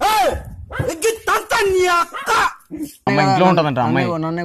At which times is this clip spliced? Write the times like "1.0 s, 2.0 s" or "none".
none